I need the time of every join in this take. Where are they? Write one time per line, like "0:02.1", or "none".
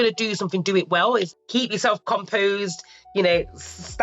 0:01.4